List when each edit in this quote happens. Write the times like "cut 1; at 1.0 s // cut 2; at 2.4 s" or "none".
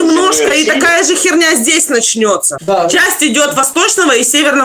cut 1; at 2.6 s